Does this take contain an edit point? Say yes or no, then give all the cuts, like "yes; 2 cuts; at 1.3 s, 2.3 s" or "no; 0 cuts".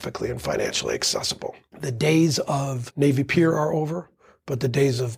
yes; 2 cuts; at 1.7 s, 2.8 s